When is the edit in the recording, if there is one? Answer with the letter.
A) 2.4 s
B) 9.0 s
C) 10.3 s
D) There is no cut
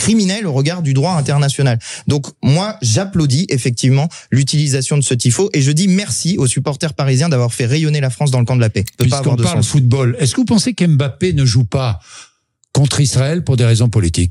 B